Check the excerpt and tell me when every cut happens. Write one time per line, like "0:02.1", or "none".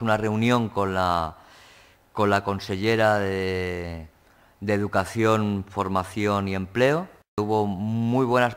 0:07.4